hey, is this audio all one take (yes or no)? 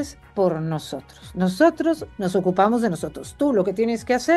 yes